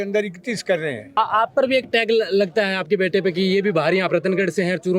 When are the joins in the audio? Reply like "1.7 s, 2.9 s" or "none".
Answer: 1.2 s

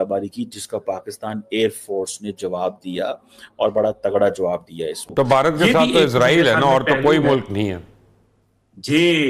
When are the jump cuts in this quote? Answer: 5.0 s

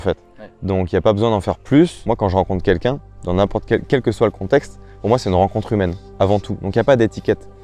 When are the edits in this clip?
2.0 s

